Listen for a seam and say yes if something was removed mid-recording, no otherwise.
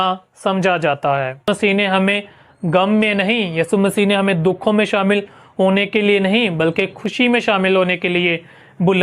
yes